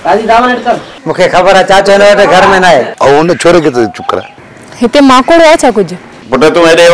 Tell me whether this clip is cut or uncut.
uncut